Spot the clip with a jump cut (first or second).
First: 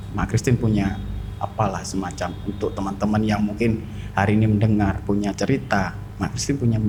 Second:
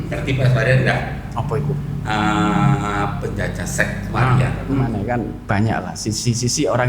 second